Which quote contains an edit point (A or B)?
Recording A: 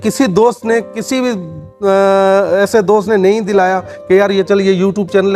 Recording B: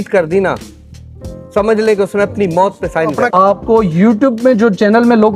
B